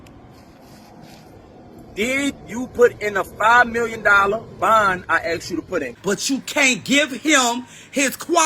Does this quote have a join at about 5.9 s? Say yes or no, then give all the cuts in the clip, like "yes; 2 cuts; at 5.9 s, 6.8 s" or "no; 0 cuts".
yes; 1 cut; at 5.9 s